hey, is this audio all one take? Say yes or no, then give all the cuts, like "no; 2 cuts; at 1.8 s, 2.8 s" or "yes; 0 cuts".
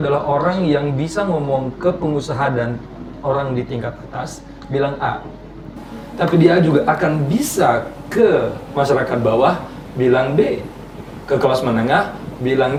yes; 0 cuts